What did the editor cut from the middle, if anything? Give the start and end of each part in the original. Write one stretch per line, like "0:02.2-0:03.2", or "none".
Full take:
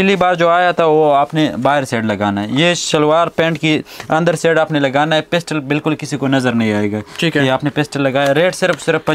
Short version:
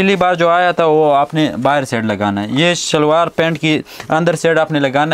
none